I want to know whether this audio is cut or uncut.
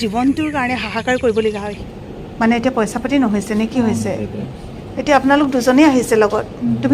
cut